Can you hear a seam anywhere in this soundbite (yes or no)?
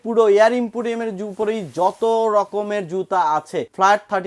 no